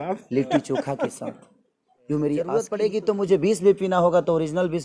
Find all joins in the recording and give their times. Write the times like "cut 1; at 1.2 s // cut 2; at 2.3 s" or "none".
cut 1; at 2.5 s